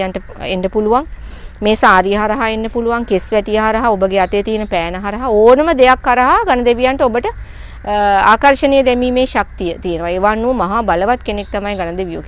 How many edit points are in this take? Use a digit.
0